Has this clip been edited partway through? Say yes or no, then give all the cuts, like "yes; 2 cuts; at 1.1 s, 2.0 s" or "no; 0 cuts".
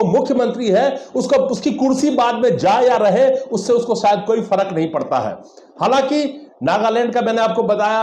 no; 0 cuts